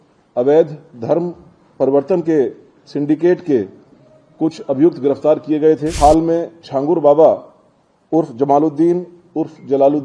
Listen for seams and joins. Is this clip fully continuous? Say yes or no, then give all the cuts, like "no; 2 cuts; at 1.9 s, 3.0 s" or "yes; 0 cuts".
no; 1 cut; at 5.9 s